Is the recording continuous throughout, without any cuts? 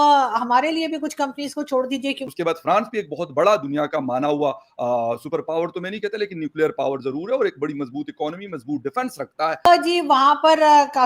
no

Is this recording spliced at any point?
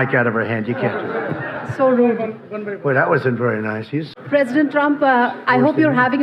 no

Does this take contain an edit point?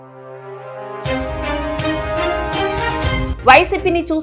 no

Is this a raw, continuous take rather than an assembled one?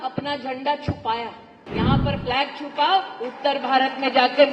no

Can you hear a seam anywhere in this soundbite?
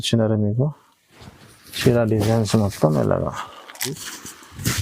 yes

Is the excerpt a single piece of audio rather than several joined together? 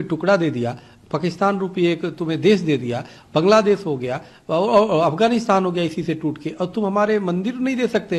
yes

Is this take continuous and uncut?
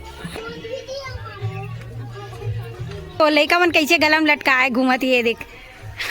no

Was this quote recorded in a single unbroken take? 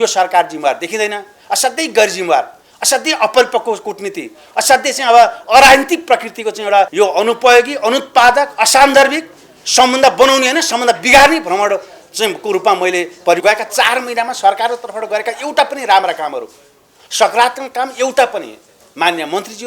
no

